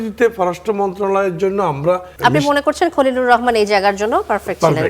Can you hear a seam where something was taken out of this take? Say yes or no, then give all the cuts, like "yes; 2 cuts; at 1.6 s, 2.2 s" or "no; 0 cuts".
yes; 1 cut; at 2.1 s